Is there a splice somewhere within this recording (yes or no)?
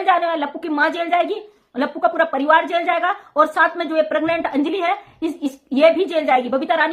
no